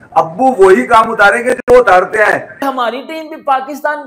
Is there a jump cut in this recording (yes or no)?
yes